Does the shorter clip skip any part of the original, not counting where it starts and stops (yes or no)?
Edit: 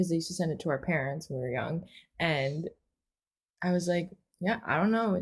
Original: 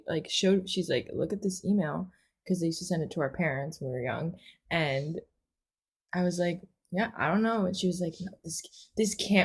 no